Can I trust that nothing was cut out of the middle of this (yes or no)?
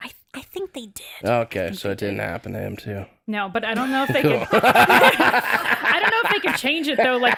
yes